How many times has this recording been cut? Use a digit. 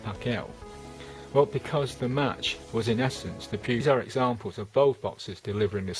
1